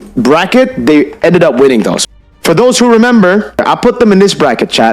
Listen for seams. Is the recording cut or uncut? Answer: cut